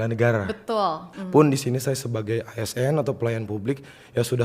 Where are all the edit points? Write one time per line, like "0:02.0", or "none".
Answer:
0:01.1